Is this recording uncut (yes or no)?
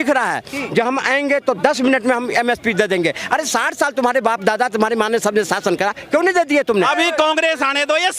no